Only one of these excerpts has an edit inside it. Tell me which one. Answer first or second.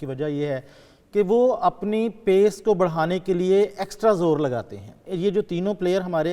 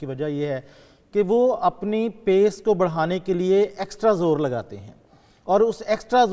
first